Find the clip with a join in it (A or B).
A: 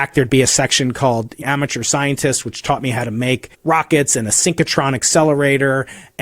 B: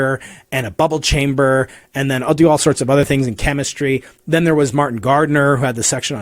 A